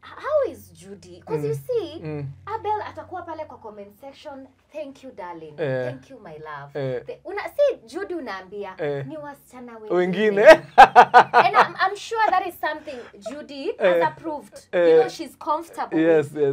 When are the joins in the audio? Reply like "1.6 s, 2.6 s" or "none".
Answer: none